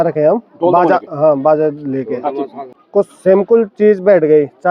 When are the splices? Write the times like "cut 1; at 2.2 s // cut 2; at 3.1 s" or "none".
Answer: cut 1; at 2.7 s